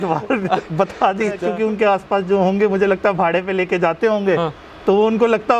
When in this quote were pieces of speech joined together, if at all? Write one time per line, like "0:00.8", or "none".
0:01.4